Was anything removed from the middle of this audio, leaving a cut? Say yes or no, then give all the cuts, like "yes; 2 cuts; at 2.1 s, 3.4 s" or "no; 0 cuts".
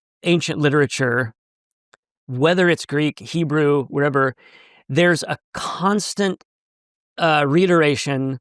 no; 0 cuts